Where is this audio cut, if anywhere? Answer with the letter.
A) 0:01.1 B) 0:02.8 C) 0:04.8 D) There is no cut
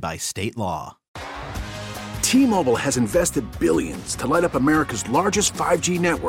A